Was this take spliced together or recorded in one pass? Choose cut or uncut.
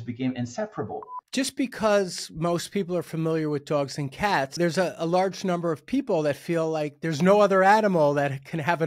cut